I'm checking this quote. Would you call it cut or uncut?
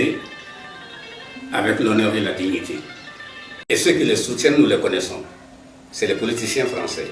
cut